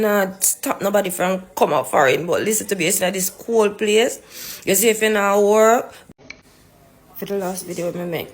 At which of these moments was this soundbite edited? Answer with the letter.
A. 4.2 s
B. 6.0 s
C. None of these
B